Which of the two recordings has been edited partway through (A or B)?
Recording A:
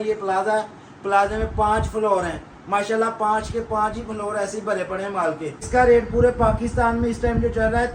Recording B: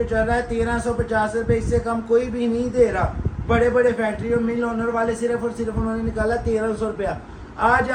A